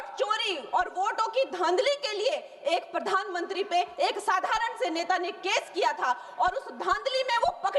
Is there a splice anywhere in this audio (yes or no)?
no